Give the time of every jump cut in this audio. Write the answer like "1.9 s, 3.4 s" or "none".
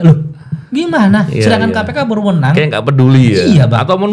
none